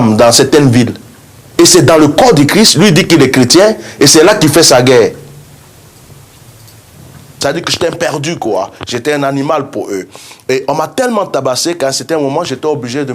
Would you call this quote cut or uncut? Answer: cut